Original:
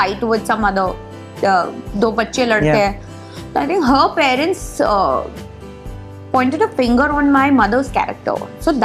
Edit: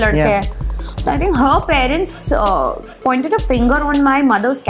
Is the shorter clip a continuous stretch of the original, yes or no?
no